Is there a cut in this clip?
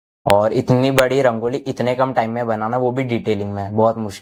no; 0 cuts

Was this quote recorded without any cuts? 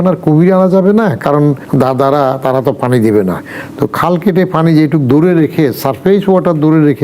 no; 1 cut; at 1.6 s

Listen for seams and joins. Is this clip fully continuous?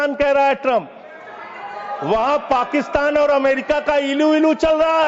yes; 0 cuts

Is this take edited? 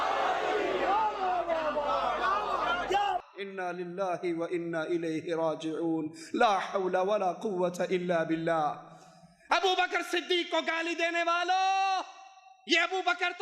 no; 0 cuts

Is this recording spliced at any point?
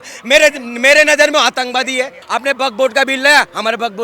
yes; 1 cut; at 2.2 s

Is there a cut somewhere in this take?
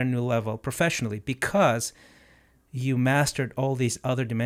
no; 0 cuts

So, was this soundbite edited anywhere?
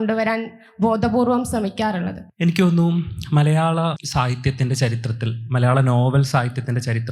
yes; 1 cut; at 2.2 s

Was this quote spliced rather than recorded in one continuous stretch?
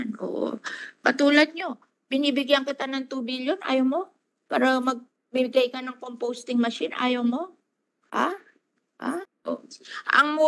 yes; 1 cut; at 9.3 s

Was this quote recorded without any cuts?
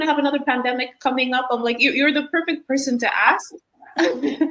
yes; 0 cuts

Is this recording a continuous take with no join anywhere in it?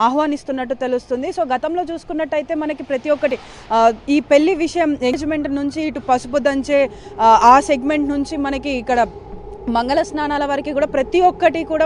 no; 1 cut; at 5.1 s

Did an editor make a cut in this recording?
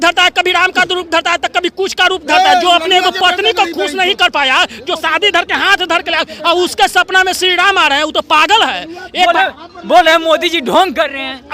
no; 0 cuts

